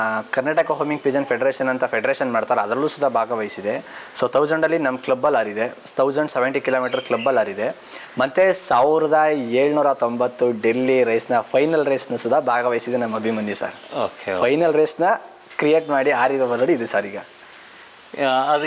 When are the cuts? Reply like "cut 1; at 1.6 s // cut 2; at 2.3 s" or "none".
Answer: none